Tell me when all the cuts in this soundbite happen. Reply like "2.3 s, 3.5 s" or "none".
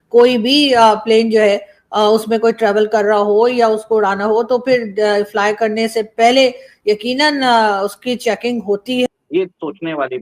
9.1 s